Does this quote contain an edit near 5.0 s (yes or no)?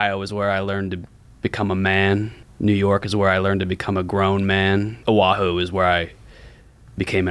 yes